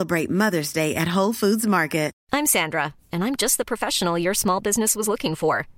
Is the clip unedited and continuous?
no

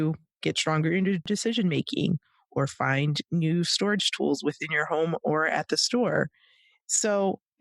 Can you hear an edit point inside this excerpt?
yes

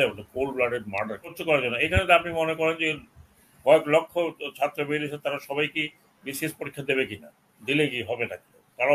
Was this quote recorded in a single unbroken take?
no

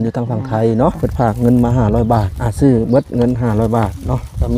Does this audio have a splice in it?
yes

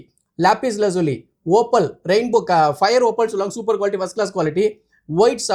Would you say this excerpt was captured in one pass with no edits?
yes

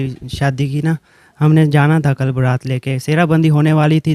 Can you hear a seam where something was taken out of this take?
no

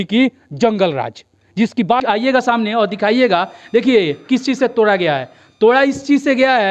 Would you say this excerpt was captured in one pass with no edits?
no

